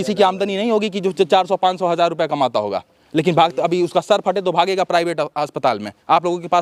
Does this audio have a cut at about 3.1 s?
no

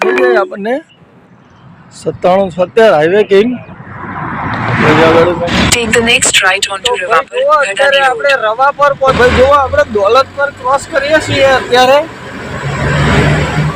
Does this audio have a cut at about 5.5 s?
yes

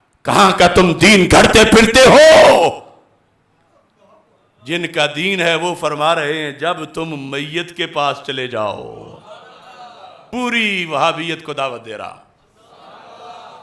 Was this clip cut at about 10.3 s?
yes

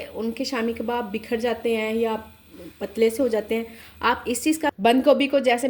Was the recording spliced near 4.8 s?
yes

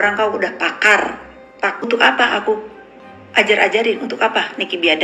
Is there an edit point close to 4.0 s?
no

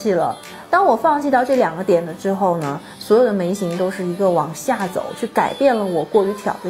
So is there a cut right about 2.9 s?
no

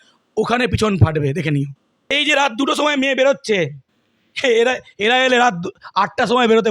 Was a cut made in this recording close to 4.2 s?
no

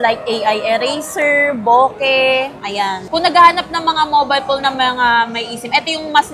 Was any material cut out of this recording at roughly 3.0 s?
yes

